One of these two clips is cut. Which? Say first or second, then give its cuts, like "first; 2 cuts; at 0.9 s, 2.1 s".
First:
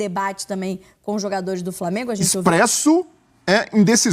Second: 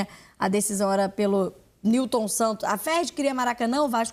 first; 1 cut; at 2.3 s